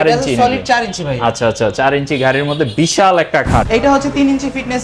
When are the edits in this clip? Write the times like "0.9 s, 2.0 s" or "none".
3.7 s